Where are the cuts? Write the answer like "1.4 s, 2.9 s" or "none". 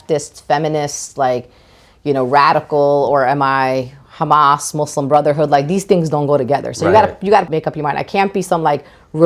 none